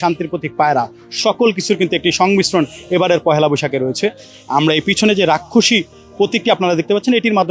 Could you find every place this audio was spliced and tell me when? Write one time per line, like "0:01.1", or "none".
none